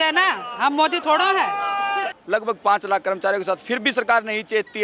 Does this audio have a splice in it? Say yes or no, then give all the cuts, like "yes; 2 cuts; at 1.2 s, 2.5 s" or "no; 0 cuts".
yes; 1 cut; at 2.2 s